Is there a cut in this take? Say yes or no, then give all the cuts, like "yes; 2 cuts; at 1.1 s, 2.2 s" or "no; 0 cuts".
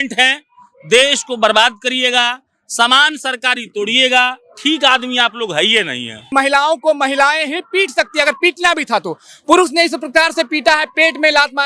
yes; 1 cut; at 6.2 s